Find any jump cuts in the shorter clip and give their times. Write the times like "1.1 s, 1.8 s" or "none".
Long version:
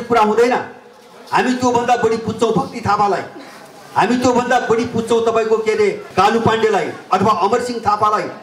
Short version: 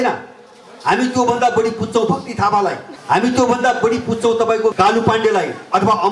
2.9 s, 4.7 s